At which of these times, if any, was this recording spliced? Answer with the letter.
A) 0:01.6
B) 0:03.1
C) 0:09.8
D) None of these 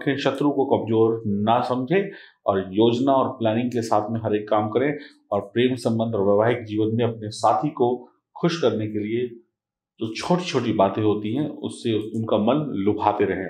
D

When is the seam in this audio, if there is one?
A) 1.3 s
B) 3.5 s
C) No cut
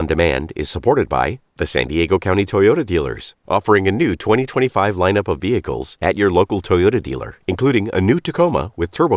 A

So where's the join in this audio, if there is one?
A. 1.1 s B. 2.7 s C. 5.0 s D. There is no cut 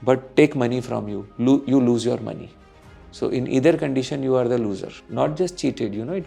C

